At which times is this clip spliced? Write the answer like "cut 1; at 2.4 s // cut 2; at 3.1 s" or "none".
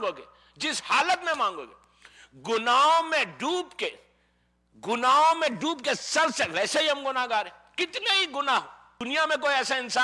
cut 1; at 8.9 s